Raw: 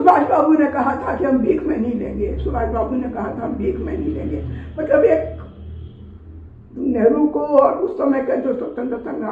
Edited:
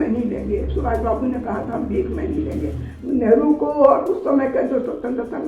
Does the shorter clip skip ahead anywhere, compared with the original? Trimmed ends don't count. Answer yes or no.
yes